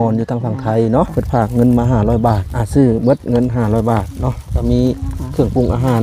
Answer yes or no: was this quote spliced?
yes